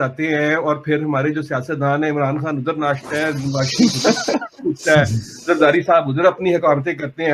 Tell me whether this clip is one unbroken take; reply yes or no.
yes